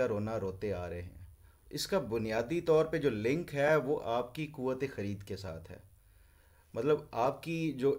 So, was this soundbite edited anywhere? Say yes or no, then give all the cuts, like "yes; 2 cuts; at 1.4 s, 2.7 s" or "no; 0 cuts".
no; 0 cuts